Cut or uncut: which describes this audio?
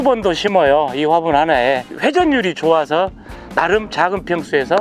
cut